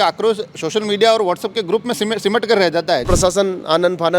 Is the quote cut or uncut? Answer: cut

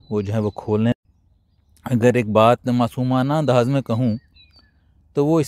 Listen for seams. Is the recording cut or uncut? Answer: cut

